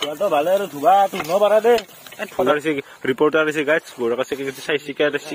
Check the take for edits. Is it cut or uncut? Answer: cut